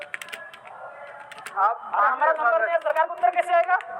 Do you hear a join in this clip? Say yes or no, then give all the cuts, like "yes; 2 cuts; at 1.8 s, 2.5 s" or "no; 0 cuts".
no; 0 cuts